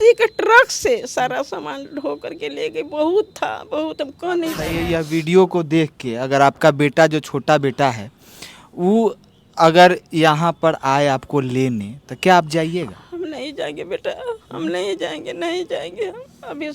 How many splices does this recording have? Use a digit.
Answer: 1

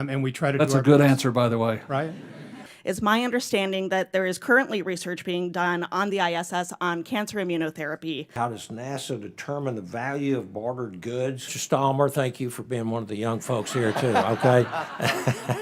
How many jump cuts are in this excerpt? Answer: 3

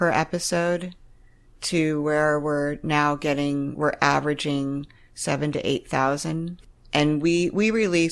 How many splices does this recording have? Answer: 0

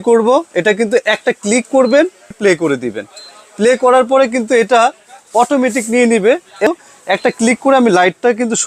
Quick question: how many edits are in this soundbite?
2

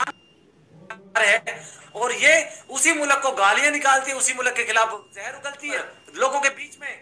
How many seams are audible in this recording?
1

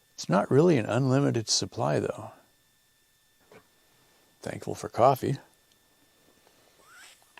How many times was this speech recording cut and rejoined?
1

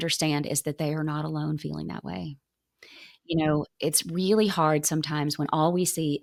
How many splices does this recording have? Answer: 0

